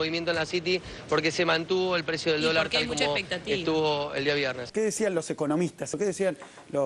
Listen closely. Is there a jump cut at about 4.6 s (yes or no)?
yes